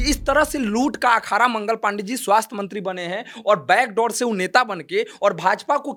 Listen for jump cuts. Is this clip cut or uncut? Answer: uncut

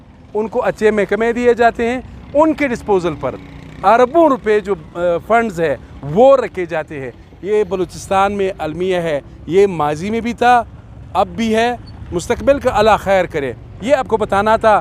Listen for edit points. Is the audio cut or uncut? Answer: uncut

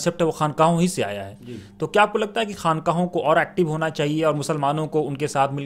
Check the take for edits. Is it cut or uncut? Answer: uncut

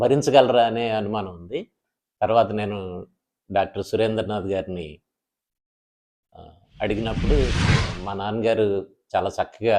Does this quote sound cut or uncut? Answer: cut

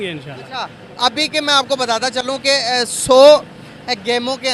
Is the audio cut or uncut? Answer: uncut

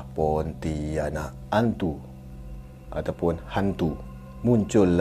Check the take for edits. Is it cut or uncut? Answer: cut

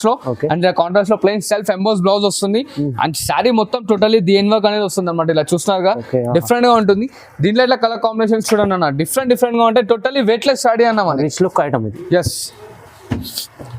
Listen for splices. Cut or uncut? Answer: uncut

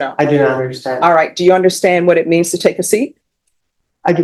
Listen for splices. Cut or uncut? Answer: uncut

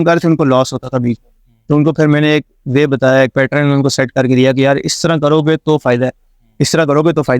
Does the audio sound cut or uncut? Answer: uncut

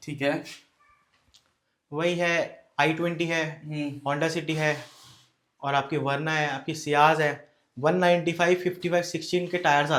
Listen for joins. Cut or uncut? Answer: uncut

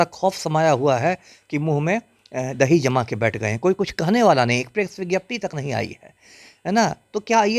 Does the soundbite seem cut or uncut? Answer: uncut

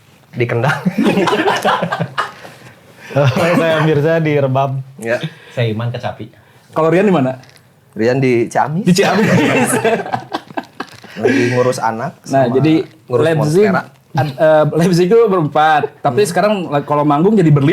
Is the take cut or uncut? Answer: uncut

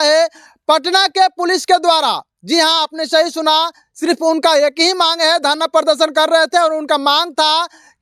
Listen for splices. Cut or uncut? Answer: uncut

